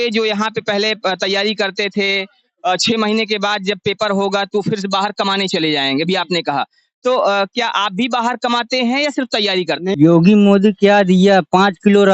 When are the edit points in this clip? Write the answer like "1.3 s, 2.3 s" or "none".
9.9 s

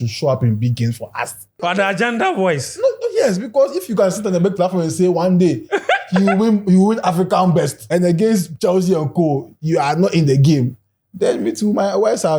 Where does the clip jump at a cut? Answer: 1.5 s, 7.8 s

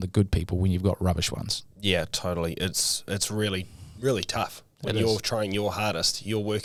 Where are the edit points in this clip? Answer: none

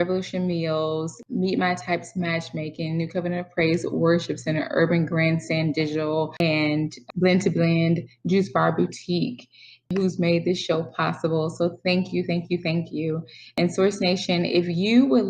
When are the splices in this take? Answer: 1.2 s, 6.5 s, 9.8 s, 13.5 s

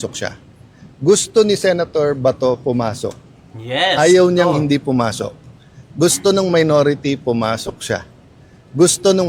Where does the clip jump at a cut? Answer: none

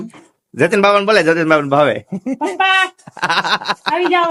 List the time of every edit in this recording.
none

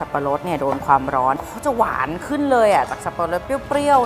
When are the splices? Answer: 1.4 s

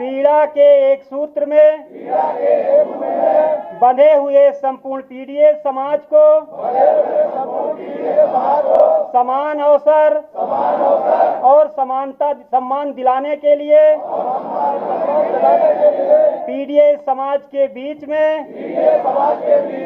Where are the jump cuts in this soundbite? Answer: 4.7 s

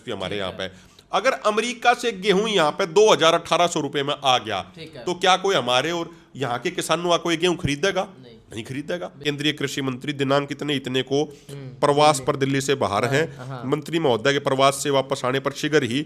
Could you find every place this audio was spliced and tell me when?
9.2 s

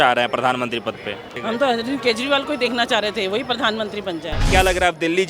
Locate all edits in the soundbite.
1.4 s, 4.5 s

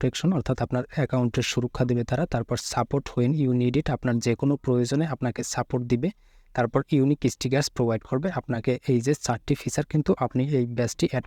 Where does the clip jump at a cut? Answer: none

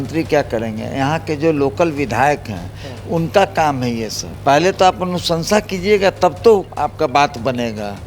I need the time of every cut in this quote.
4.2 s, 6.7 s

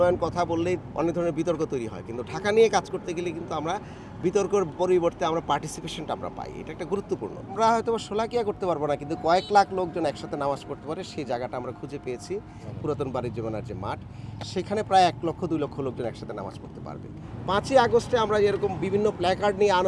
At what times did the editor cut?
7.5 s, 17.3 s

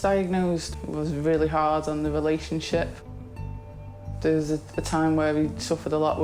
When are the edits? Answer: none

